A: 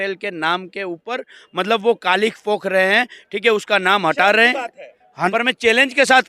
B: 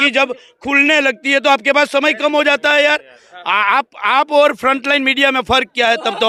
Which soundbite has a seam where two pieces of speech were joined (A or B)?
A